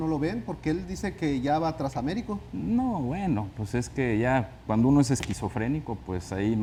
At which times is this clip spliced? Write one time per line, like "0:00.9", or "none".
none